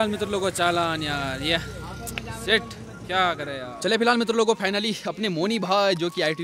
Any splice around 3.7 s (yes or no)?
yes